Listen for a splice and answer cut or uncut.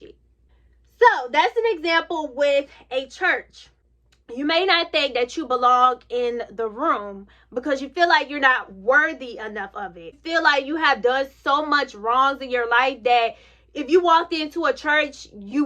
uncut